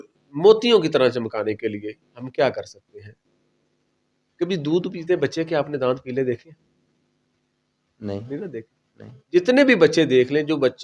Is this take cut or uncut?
uncut